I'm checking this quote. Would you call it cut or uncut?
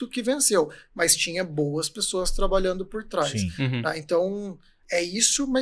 uncut